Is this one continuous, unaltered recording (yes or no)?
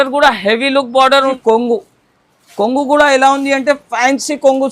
no